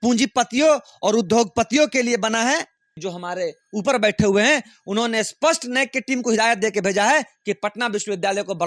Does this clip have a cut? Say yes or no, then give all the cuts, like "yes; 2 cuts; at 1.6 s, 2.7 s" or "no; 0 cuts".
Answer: yes; 1 cut; at 3.0 s